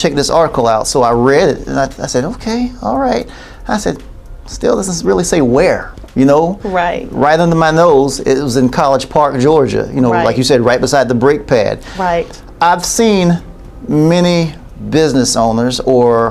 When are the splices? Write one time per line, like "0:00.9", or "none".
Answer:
none